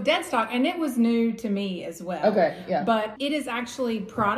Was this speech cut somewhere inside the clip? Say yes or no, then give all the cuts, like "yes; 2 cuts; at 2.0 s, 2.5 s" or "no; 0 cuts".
yes; 1 cut; at 3.1 s